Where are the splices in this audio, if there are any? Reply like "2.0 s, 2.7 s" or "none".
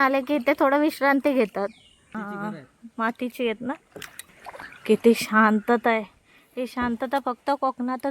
2.1 s, 4.3 s